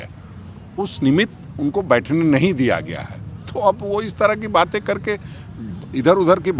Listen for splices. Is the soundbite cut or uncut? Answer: uncut